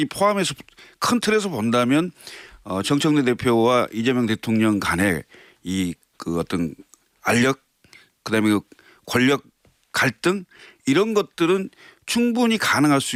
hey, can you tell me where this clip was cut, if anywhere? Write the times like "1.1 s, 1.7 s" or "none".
none